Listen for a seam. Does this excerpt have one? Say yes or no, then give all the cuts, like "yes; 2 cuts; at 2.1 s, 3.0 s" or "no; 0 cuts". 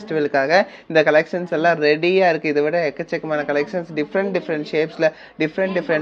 no; 0 cuts